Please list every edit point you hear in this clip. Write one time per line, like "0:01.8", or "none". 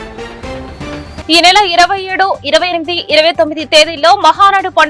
none

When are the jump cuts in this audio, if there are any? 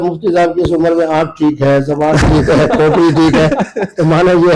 none

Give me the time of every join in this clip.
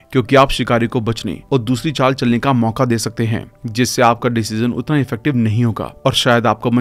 none

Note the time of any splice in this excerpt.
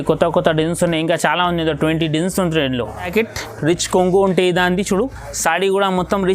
0:03.1

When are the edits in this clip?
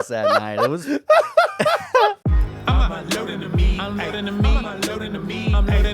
0:02.8

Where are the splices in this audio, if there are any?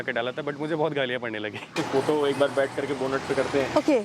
0:01.7

